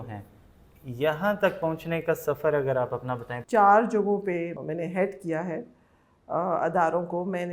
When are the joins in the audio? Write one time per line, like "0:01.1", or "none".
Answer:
0:03.3
0:04.6